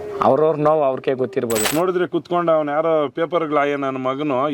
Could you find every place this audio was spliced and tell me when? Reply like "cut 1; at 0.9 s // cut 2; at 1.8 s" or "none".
cut 1; at 1.7 s